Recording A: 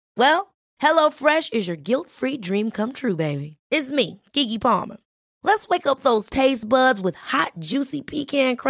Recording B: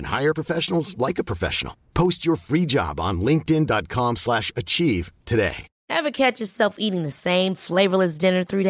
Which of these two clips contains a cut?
B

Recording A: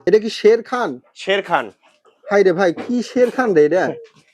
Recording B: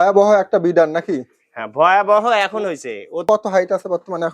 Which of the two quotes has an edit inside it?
B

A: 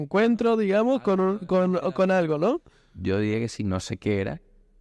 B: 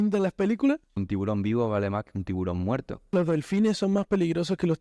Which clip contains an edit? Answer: B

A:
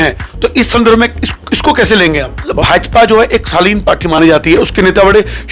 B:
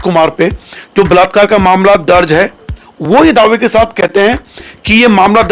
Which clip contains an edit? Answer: A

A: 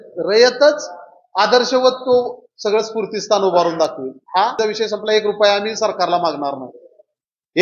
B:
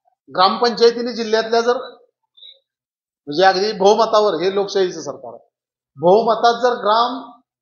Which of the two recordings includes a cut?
A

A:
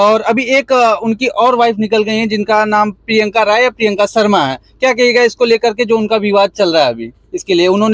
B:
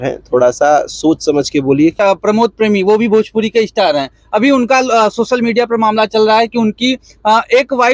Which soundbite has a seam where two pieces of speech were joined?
B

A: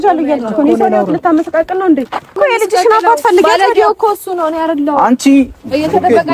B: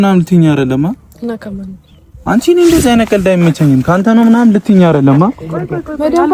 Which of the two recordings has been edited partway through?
A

